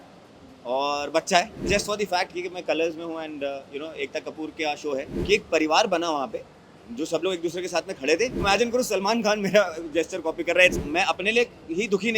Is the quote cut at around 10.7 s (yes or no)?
yes